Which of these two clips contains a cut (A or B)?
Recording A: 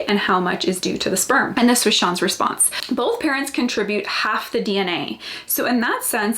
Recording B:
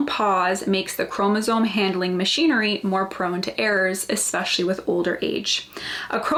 A